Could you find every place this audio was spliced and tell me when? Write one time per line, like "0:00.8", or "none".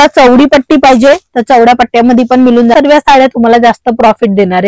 0:02.7